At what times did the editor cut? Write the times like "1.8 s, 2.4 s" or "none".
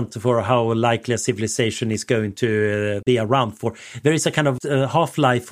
3.0 s, 4.6 s